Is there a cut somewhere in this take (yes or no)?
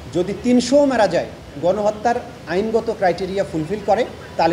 no